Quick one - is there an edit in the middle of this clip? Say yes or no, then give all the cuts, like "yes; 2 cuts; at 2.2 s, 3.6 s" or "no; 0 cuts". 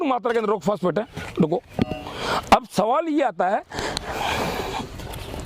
no; 0 cuts